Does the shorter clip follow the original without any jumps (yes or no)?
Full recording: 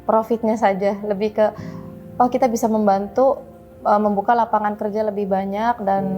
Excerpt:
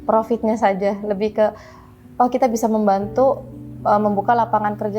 yes